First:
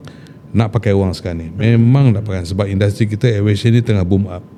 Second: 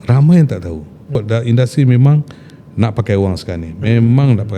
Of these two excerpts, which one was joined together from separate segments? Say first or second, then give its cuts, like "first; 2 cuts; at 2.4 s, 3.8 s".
second; 1 cut; at 1.2 s